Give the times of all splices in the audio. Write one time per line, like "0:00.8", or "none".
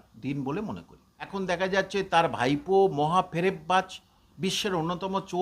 0:01.3